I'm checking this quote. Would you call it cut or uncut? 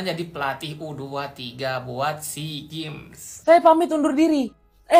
cut